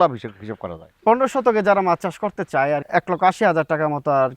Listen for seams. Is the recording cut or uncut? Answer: cut